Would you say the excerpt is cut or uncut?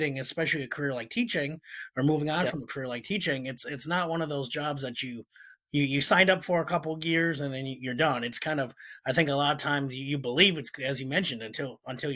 uncut